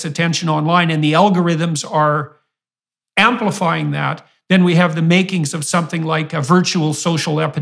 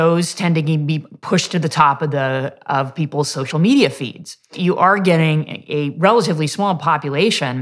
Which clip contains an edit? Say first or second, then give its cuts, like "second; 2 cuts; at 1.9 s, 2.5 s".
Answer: second; 1 cut; at 4.5 s